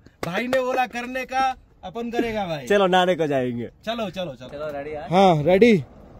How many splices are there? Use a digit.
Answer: 1